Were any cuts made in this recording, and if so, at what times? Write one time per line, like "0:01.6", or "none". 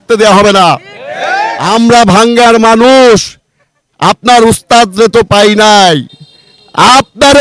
0:01.5